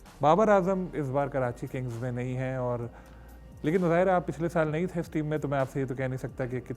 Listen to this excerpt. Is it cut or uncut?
uncut